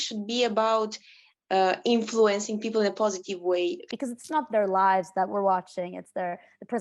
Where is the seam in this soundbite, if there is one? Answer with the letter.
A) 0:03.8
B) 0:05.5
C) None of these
A